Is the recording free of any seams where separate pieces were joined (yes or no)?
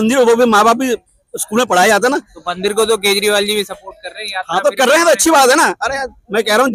yes